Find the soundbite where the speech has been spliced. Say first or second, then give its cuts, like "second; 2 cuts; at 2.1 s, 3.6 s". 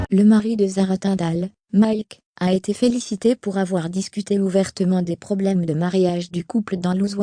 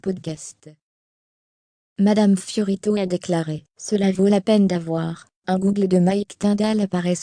first; 1 cut; at 1.1 s